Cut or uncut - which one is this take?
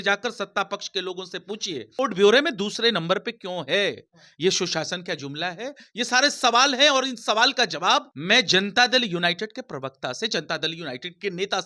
cut